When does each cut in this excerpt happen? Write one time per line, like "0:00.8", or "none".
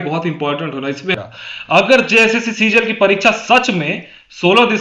0:01.1